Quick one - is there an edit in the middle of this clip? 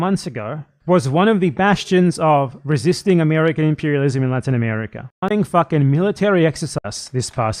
yes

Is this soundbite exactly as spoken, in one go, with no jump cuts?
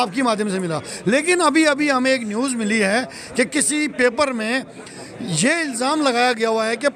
yes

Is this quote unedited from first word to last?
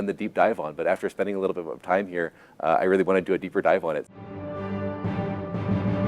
no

